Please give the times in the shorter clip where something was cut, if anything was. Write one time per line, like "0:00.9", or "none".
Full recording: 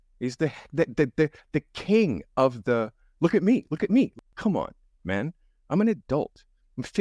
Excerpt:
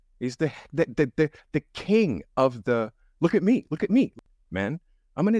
0:04.3